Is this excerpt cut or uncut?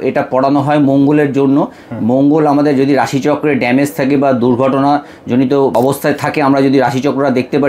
cut